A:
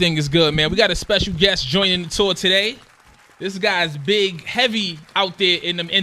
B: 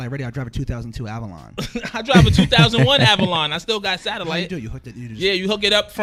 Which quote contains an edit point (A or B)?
A